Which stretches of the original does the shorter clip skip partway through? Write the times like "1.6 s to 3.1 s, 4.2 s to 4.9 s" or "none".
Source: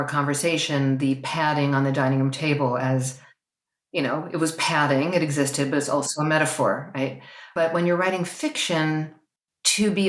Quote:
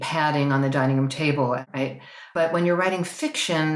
2.8 s to 6.8 s